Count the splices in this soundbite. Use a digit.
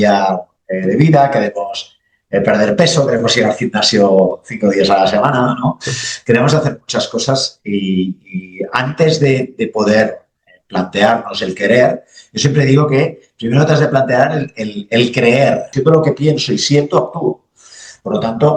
1